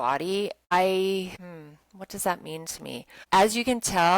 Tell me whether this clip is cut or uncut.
cut